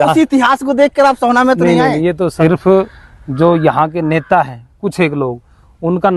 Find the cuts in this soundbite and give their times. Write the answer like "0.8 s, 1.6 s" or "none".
2.4 s